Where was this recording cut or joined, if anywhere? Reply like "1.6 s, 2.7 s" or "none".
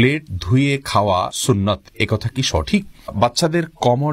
1.4 s, 3.1 s